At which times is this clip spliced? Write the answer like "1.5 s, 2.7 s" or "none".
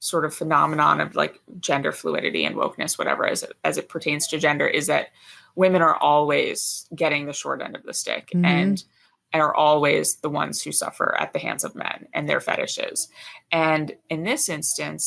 none